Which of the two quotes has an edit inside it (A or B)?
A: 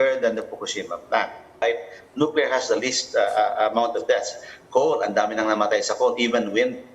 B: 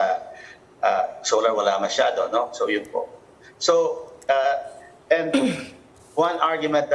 A